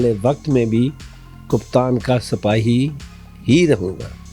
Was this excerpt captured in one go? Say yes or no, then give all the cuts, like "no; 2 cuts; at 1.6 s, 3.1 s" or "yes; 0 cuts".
yes; 0 cuts